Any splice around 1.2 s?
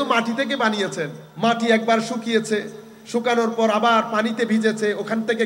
yes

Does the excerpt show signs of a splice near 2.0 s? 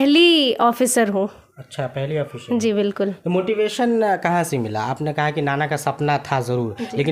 no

